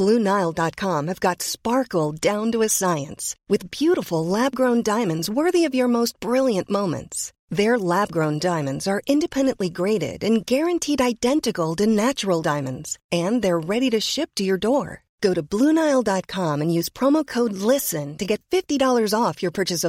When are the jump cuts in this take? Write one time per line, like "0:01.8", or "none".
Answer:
none

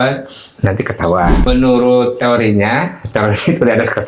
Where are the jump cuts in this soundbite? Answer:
0:01.4

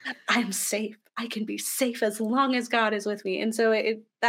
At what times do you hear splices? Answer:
0:03.4

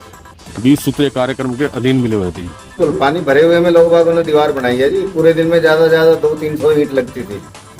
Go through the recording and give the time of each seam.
0:02.8

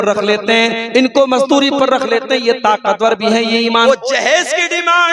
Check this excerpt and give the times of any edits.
0:03.9

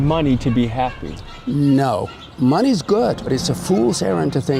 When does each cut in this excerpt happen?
0:03.3

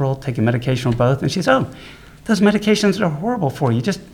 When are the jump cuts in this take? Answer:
none

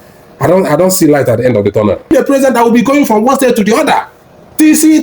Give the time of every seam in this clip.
0:02.1

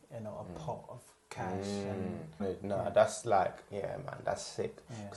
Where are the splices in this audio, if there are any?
0:02.4

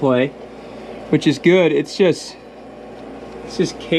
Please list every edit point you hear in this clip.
none

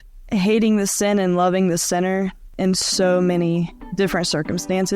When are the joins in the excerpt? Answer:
0:02.5
0:03.8

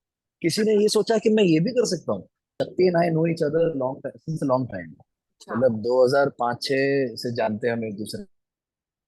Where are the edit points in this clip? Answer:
0:02.5

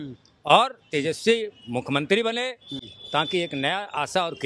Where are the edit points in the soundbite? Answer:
none

